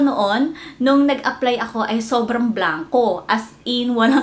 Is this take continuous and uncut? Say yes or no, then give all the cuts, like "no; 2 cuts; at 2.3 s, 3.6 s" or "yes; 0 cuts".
yes; 0 cuts